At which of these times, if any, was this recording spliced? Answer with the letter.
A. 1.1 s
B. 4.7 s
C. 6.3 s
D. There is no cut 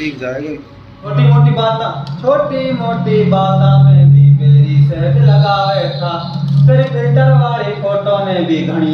A